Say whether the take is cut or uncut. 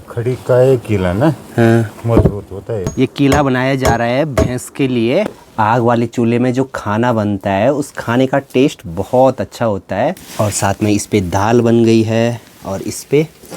cut